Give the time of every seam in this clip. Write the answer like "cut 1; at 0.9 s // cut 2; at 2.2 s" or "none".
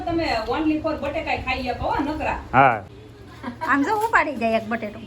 cut 1; at 2.9 s